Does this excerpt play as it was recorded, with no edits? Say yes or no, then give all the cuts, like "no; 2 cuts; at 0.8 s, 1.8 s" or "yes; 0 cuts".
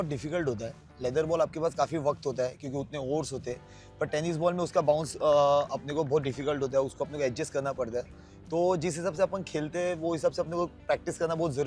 yes; 0 cuts